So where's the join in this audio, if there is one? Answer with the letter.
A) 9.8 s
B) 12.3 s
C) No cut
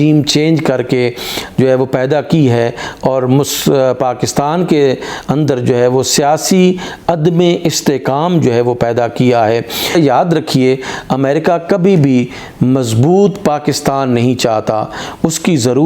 A